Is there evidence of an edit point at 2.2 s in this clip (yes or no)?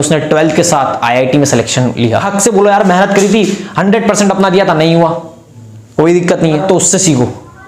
yes